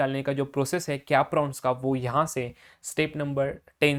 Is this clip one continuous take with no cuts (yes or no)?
yes